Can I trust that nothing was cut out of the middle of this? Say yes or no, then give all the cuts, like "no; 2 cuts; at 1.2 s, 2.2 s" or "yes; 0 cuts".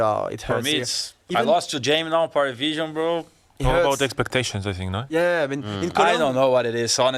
yes; 0 cuts